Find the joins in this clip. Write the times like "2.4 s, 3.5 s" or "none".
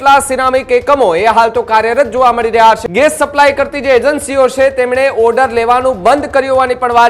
2.8 s